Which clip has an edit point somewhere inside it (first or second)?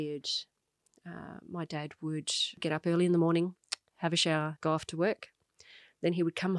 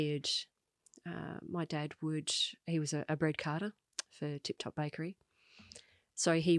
first